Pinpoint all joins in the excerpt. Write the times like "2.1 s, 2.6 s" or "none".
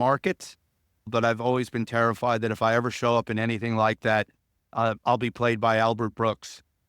1.1 s